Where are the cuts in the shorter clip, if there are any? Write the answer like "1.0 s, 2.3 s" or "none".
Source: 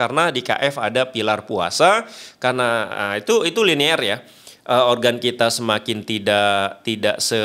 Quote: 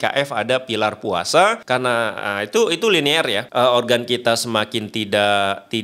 1.6 s, 3.4 s